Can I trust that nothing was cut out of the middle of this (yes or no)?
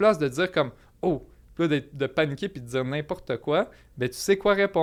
yes